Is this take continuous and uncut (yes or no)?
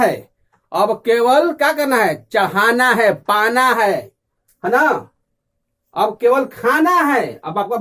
yes